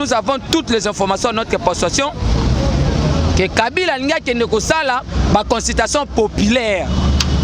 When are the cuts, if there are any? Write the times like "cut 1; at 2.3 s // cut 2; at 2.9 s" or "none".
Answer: none